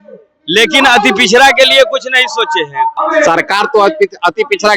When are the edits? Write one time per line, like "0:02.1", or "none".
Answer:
0:03.0